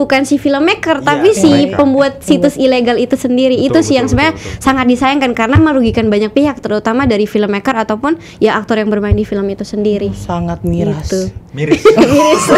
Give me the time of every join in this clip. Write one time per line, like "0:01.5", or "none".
none